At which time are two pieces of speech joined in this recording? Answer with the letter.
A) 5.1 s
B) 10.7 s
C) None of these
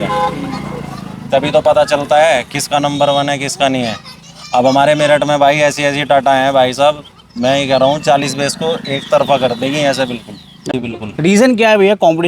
B